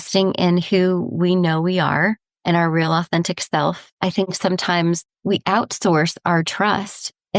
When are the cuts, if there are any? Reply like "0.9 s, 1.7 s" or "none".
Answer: 3.9 s, 5.1 s